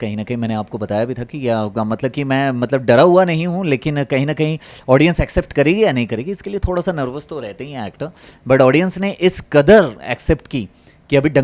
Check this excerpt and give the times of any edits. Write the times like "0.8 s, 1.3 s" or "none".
none

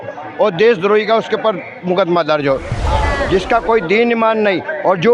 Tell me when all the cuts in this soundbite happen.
2.8 s

